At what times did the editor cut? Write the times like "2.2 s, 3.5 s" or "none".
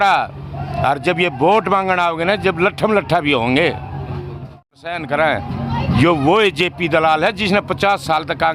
4.8 s